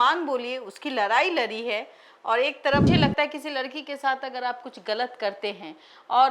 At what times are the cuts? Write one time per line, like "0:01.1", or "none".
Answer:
0:02.9